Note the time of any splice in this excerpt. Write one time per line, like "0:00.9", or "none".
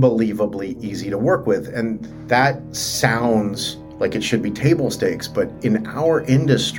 none